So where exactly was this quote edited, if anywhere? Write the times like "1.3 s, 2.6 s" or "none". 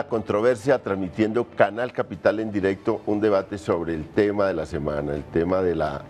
none